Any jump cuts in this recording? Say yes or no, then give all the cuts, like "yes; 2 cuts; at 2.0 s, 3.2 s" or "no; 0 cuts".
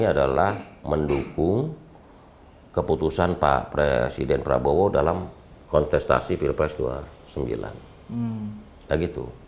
no; 0 cuts